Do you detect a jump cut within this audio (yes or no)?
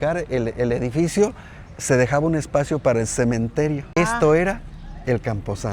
yes